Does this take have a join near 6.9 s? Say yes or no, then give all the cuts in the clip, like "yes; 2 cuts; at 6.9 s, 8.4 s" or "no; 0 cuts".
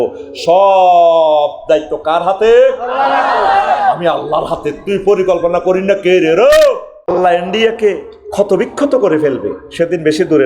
yes; 1 cut; at 6.9 s